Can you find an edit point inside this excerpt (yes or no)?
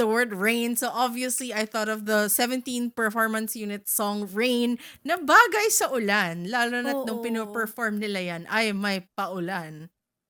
no